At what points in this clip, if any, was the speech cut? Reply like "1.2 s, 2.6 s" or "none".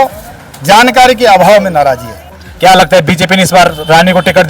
2.4 s